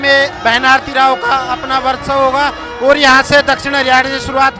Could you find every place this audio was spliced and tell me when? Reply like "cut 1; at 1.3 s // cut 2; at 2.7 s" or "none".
none